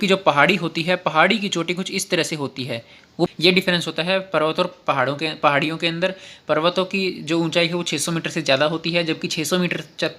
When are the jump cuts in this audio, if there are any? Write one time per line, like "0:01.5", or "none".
0:03.3